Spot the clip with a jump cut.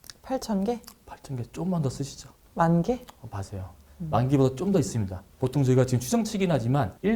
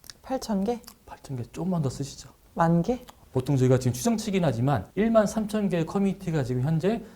second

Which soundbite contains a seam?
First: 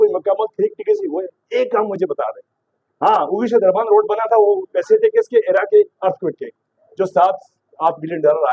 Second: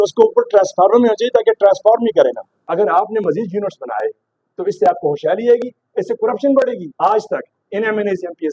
second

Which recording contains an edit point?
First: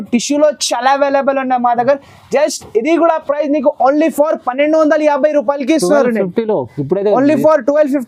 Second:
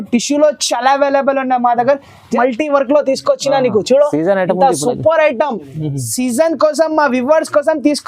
second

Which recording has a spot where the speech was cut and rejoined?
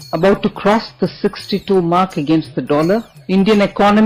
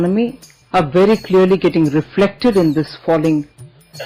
first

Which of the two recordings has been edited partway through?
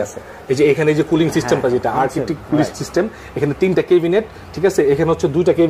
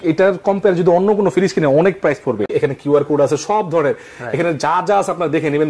second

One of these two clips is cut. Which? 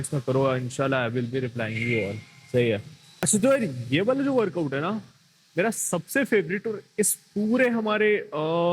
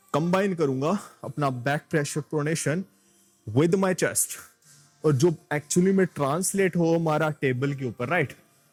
first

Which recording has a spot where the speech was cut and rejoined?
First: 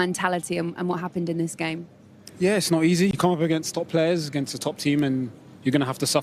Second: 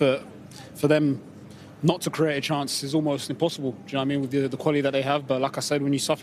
first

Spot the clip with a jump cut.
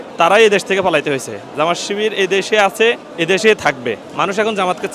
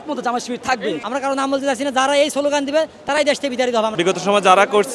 second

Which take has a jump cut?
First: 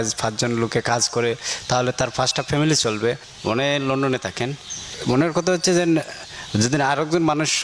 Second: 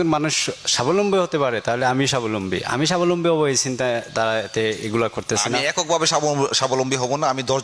first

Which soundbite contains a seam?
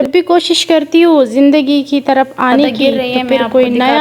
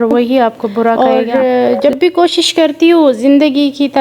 second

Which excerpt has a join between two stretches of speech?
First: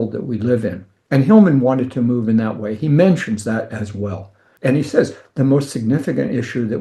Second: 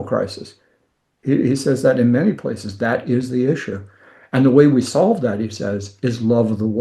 first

